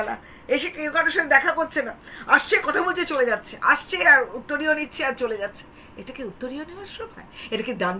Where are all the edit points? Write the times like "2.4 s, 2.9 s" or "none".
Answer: none